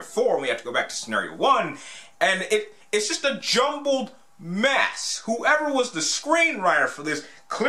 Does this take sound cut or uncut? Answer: uncut